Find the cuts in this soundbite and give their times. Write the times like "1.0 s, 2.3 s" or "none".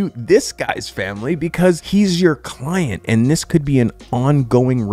1.8 s